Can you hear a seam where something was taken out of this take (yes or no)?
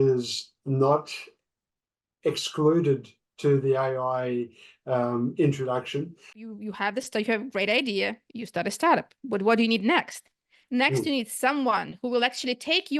yes